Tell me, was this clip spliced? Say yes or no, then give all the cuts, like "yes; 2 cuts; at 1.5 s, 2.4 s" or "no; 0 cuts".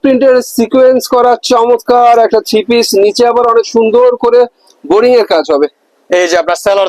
no; 0 cuts